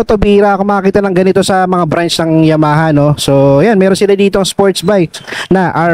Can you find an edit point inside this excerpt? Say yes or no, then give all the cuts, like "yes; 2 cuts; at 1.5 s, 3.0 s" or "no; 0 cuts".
no; 0 cuts